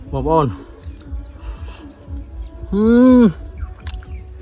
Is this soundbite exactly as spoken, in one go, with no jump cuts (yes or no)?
yes